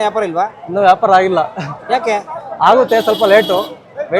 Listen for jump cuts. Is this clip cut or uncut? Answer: uncut